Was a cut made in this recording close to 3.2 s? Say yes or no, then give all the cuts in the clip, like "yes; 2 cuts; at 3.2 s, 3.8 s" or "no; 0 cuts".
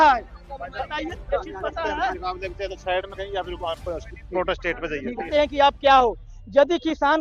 no; 1 cut; at 5.3 s